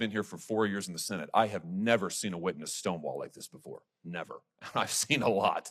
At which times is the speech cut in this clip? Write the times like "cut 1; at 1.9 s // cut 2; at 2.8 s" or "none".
cut 1; at 4.5 s

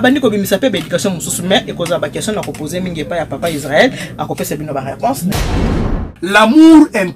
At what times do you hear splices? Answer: cut 1; at 5.8 s

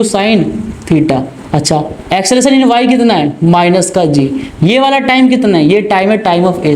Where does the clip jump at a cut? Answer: none

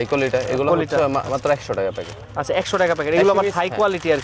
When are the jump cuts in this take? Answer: none

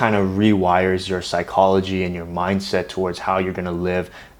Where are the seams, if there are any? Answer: none

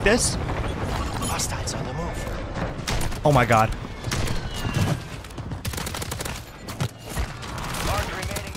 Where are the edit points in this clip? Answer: none

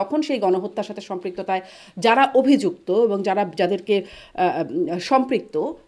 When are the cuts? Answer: none

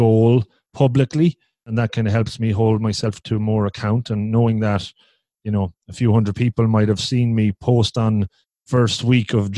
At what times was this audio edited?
cut 1; at 1.7 s

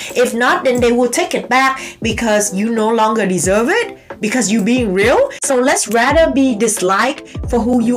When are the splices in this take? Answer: cut 1; at 5.4 s

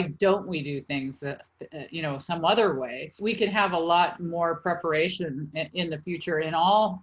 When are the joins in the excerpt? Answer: cut 1; at 3.2 s

